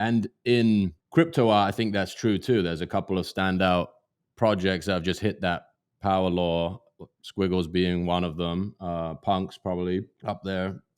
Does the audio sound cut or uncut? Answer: cut